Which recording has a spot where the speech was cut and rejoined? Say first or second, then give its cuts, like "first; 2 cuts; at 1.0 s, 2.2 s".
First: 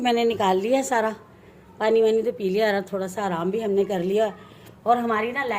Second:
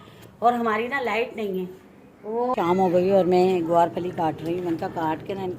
second; 1 cut; at 2.5 s